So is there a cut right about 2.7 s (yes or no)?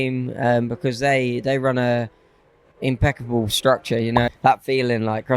no